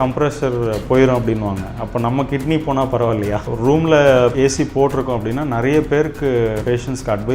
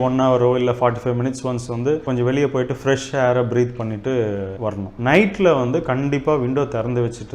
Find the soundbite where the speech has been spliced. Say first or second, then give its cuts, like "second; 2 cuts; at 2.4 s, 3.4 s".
second; 1 cut; at 4.9 s